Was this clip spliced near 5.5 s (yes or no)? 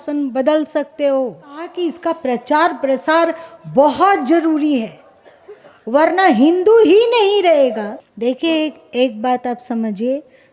no